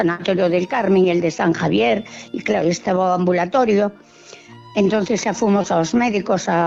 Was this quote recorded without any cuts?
yes; 0 cuts

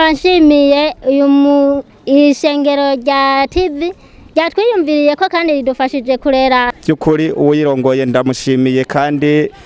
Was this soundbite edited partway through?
yes; 1 cut; at 6.7 s

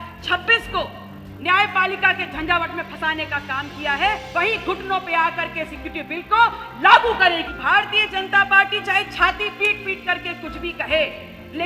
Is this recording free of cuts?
no; 2 cuts; at 4.2 s, 7.5 s

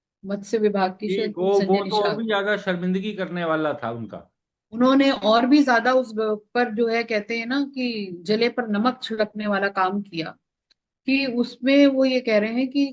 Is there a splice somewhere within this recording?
no; 0 cuts

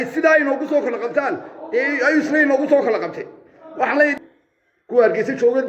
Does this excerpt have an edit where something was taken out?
yes; 1 cut; at 4.2 s

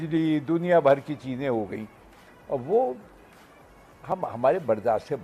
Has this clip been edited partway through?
no; 0 cuts

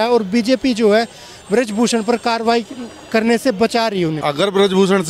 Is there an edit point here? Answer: yes; 1 cut; at 4.2 s

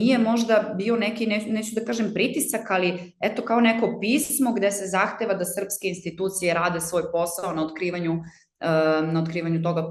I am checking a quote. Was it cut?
no; 0 cuts

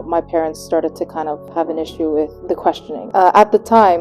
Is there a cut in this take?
yes; 2 cuts; at 1.4 s, 2.9 s

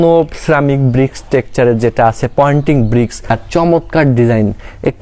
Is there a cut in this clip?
yes; 1 cut; at 3.3 s

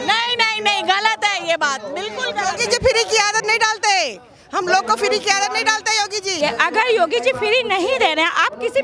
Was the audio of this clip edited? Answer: yes; 1 cut; at 6.4 s

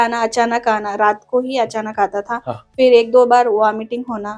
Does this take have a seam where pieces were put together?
no; 0 cuts

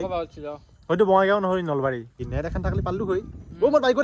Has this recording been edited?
yes; 1 cut; at 2.2 s

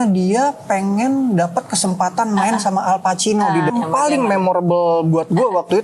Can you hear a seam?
yes; 1 cut; at 3.7 s

